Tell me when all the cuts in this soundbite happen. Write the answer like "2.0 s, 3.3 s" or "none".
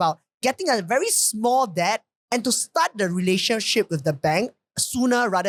none